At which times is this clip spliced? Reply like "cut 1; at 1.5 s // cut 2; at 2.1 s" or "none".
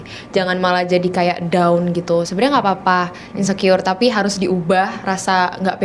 none